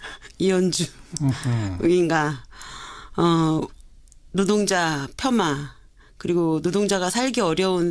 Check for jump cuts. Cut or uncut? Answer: cut